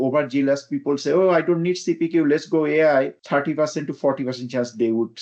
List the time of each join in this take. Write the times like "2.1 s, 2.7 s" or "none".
3.2 s